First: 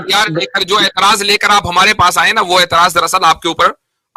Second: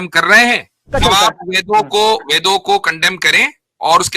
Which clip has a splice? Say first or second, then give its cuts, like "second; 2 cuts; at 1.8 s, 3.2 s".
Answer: second; 1 cut; at 0.9 s